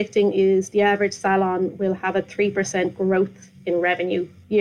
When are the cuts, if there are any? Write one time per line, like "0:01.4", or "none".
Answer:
none